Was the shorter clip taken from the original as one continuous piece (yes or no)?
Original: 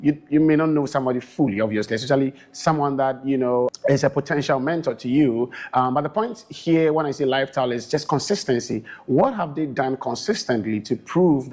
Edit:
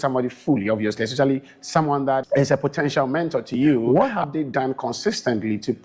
no